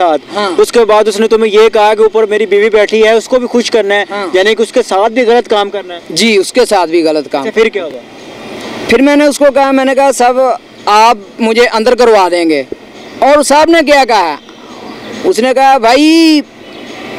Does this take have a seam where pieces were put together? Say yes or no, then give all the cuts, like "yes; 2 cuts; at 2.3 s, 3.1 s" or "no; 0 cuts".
no; 0 cuts